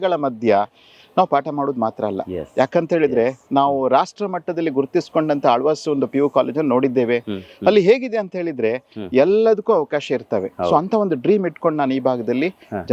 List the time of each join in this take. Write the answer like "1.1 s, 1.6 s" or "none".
none